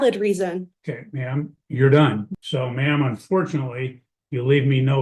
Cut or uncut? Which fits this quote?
cut